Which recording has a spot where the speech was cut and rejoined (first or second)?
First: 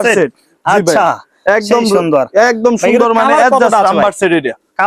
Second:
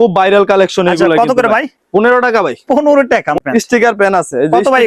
second